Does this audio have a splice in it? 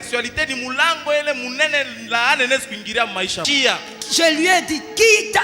yes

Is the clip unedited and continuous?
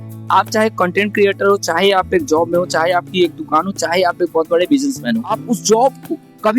no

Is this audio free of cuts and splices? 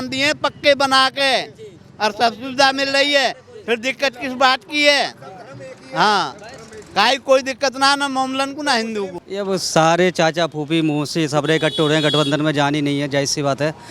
no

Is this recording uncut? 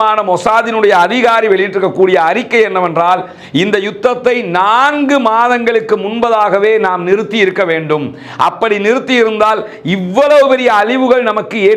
yes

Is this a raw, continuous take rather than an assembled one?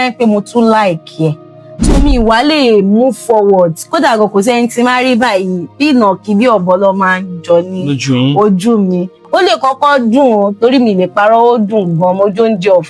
no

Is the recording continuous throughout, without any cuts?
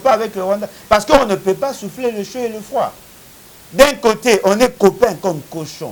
yes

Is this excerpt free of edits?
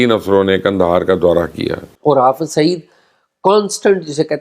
no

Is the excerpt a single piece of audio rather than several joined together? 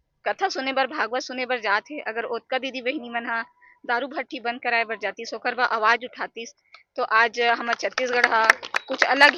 yes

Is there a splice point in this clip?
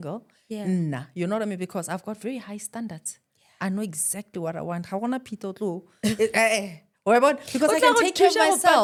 no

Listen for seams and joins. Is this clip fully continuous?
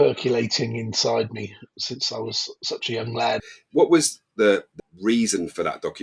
no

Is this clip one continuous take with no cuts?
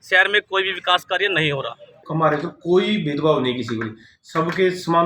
no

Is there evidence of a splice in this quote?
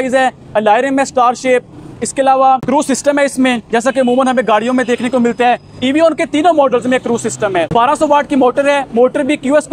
yes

